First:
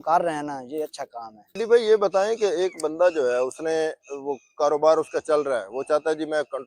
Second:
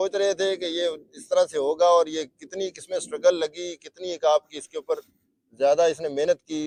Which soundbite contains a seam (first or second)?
first